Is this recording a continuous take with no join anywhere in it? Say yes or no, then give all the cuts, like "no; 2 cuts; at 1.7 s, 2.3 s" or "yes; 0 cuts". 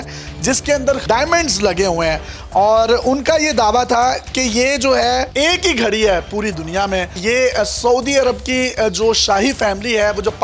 no; 2 cuts; at 1.0 s, 5.3 s